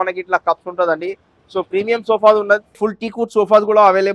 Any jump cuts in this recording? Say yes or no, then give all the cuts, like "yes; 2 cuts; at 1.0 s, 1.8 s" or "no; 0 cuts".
yes; 1 cut; at 2.8 s